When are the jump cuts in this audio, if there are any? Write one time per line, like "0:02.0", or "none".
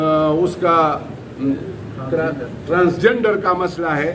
0:01.6